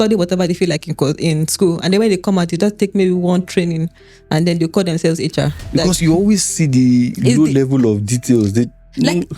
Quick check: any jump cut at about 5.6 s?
yes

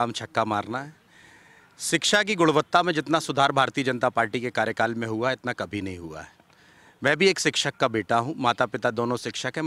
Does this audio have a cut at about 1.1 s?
no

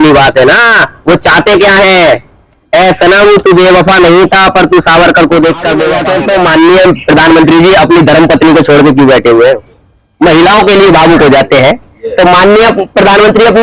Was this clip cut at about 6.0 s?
yes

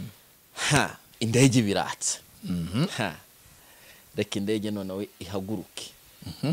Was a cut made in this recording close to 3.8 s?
no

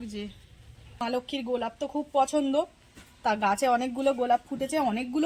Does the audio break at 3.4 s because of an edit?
no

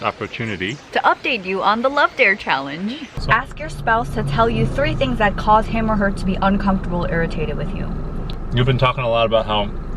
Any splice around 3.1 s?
yes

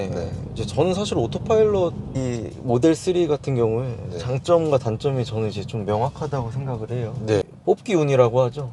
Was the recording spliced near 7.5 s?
yes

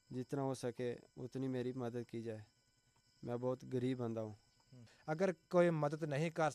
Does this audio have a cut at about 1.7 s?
no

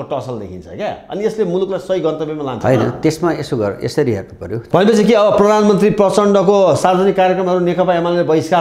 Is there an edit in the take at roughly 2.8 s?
no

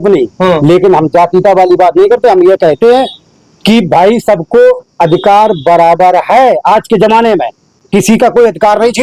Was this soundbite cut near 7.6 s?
no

